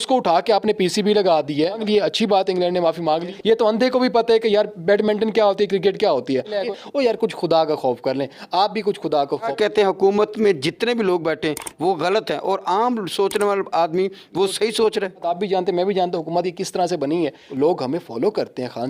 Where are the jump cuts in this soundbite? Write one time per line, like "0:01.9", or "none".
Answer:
0:01.8
0:03.3
0:06.6
0:09.5
0:15.3
0:17.4

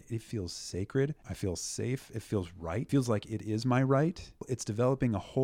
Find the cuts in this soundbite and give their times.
0:01.2
0:02.9
0:04.5

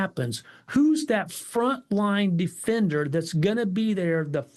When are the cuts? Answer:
none

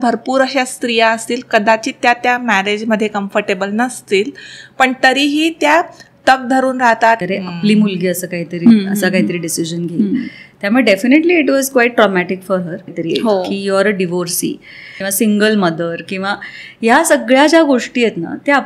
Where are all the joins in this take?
0:07.2
0:12.9
0:15.0

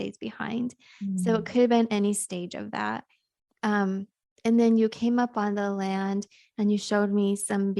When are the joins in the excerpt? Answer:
none

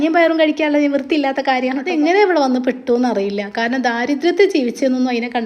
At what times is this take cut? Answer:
0:01.8

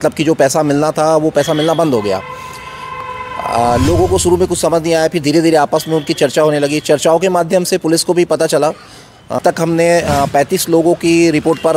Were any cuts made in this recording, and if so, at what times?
0:09.4

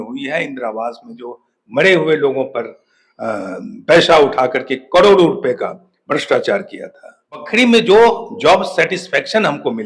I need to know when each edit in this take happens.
0:07.5

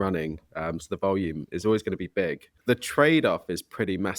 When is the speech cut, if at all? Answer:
0:02.5

